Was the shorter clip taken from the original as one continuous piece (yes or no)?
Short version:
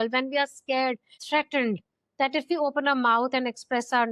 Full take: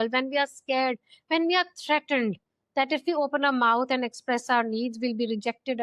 no